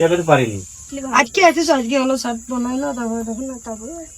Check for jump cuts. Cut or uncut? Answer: cut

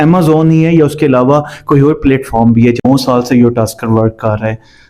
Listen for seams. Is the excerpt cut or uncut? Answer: cut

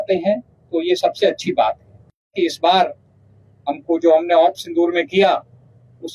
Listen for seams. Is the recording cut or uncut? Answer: cut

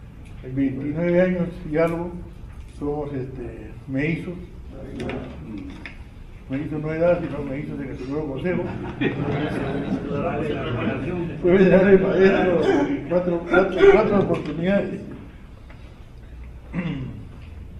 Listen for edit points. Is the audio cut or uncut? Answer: uncut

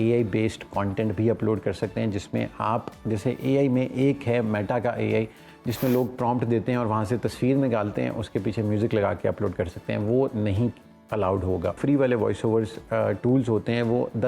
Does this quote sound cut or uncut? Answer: cut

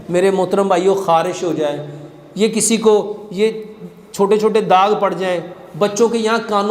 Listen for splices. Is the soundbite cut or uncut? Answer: uncut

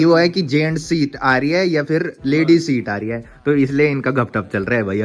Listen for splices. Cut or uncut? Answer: uncut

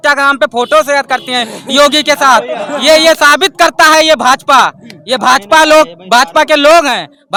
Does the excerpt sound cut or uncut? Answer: uncut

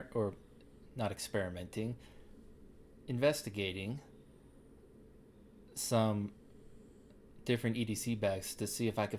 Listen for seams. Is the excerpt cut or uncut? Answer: uncut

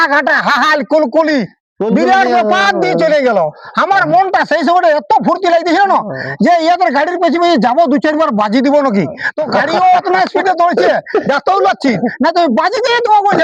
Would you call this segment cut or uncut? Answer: uncut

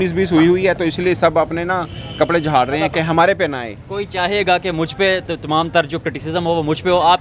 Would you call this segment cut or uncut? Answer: uncut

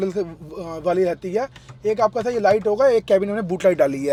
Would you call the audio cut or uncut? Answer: uncut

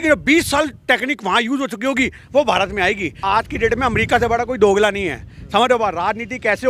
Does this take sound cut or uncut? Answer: cut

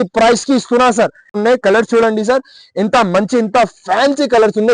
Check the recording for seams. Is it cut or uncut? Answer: cut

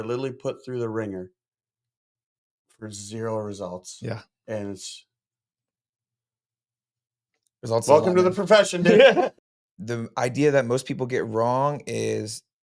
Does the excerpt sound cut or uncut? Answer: cut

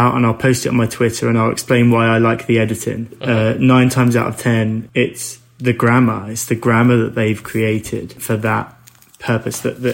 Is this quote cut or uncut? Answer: cut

